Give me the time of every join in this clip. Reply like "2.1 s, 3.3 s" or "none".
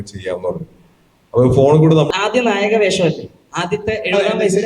2.2 s